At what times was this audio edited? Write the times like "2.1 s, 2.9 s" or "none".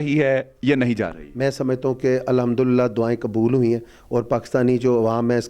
none